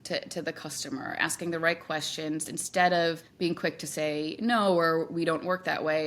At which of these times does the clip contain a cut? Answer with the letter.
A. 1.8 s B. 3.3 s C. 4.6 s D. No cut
B